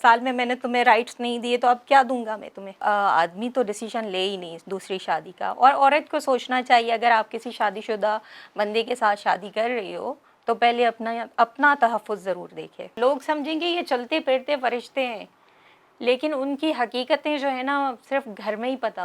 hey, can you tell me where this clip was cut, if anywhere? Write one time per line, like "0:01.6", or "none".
0:02.8
0:13.0

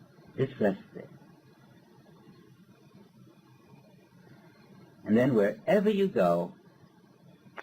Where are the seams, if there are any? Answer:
0:03.1

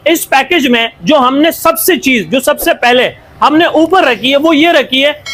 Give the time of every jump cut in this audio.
none

